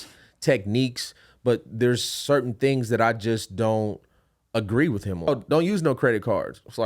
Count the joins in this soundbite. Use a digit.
1